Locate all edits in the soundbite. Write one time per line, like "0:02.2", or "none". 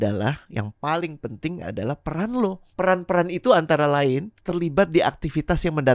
0:02.6
0:04.3